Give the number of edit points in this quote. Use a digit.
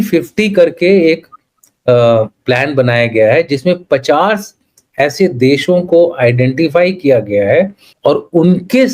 1